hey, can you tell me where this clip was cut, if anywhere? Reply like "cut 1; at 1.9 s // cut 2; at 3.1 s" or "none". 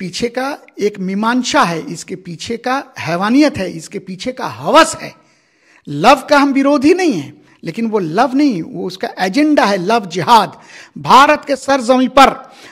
none